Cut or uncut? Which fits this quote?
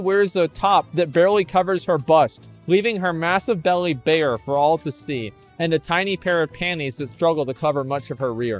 uncut